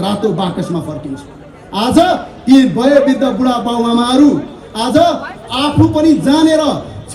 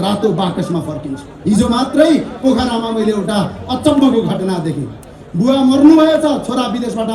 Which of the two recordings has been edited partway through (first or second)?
second